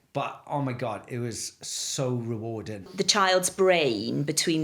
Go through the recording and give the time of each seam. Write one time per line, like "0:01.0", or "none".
0:02.8